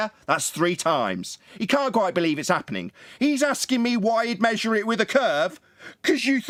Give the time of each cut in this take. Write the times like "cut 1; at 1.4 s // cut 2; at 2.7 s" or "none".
none